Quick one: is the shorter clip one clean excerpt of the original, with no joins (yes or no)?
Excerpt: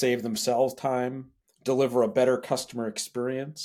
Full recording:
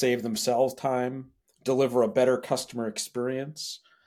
yes